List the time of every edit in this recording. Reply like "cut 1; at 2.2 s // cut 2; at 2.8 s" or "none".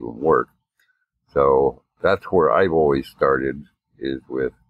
cut 1; at 1.9 s